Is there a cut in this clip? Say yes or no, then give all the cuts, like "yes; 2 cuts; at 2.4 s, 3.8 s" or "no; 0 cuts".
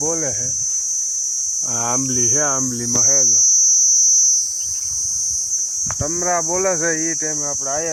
no; 0 cuts